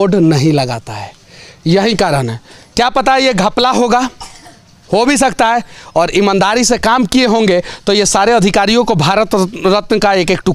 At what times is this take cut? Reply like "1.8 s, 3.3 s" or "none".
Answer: none